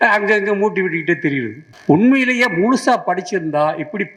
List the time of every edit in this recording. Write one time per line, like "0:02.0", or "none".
0:01.6